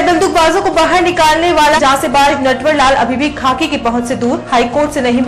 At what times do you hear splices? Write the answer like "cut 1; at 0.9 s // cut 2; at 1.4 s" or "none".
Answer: none